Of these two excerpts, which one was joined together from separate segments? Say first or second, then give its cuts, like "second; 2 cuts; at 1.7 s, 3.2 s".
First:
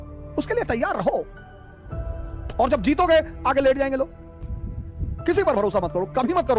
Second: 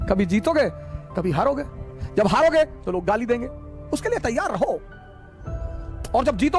first; 1 cut; at 4.3 s